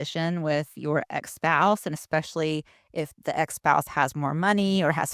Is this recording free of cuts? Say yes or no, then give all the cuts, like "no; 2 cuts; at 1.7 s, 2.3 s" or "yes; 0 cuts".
yes; 0 cuts